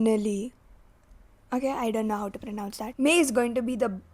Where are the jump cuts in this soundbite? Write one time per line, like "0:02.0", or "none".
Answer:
0:02.8

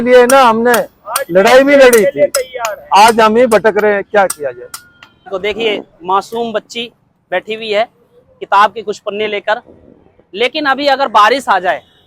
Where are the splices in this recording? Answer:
0:05.3

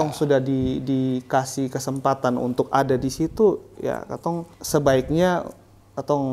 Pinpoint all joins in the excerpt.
0:04.5

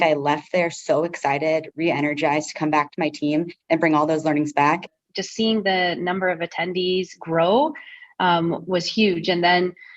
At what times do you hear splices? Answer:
0:04.9

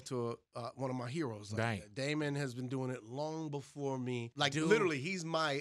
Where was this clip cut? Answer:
0:04.3

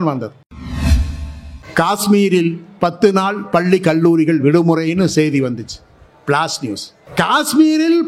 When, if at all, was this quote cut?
0:07.0

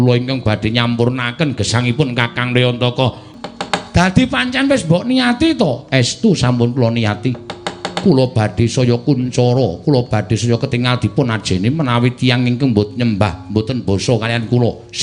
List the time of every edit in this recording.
0:03.2

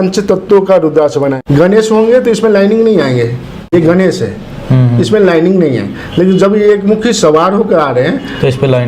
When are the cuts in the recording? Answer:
0:01.4
0:03.7

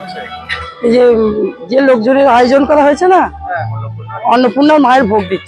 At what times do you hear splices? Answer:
none

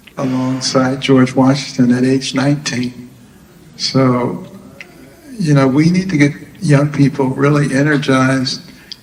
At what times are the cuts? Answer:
none

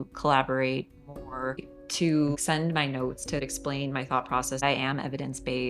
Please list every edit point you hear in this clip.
0:01.7
0:03.4
0:04.6

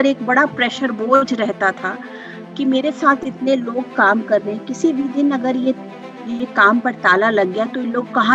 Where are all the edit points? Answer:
none

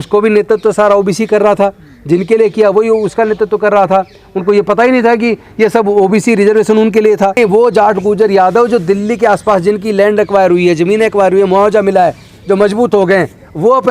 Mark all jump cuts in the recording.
0:07.4

